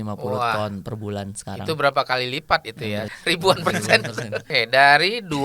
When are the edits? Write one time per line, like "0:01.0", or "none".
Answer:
0:03.1
0:04.4